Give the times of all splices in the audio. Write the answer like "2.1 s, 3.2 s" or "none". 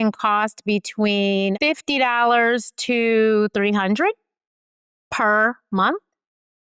1.6 s